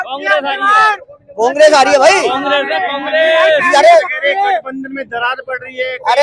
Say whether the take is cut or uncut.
uncut